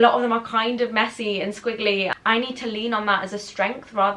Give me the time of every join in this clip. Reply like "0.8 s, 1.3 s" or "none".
2.1 s